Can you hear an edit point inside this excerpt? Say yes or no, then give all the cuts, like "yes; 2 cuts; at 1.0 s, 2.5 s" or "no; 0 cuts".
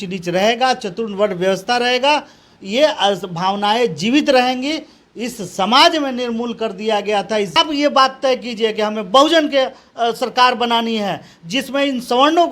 yes; 1 cut; at 7.6 s